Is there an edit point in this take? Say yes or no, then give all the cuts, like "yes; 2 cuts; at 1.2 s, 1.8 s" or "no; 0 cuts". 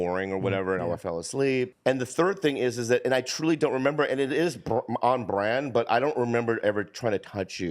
yes; 1 cut; at 1.7 s